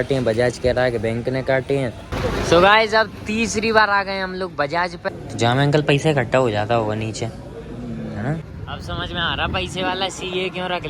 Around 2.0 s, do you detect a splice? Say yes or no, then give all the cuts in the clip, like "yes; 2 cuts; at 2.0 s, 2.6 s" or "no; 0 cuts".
yes; 3 cuts; at 2.0 s, 5.1 s, 8.5 s